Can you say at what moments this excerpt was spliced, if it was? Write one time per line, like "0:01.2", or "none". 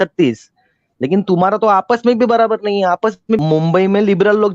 0:03.4